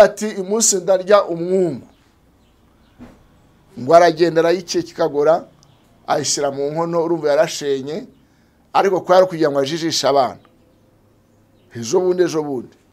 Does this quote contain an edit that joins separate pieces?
no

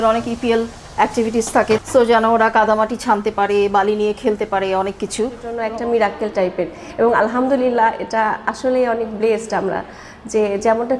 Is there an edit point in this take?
yes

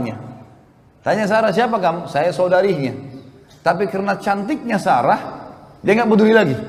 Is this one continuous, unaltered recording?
yes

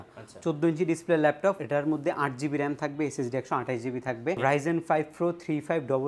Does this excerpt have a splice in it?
yes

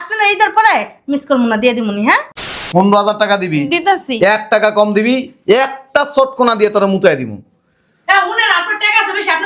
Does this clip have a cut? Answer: yes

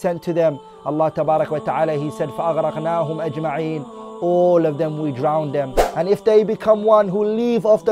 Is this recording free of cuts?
no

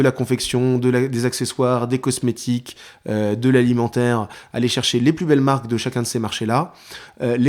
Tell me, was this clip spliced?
no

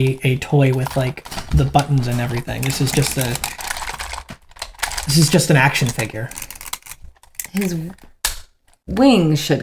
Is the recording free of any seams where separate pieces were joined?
yes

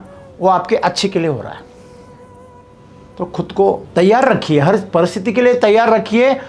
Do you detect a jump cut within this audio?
yes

